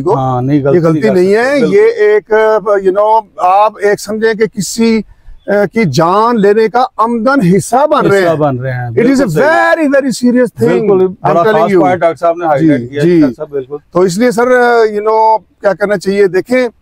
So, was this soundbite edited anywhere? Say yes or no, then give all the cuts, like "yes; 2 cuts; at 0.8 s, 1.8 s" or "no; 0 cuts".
no; 0 cuts